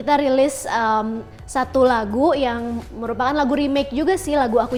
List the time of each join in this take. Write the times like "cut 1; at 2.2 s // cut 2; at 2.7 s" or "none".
none